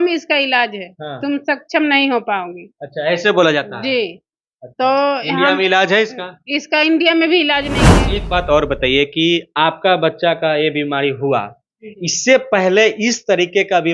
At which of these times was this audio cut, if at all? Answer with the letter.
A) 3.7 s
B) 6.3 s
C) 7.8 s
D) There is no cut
C